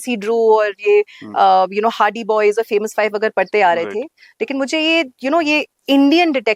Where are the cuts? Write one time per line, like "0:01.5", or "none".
none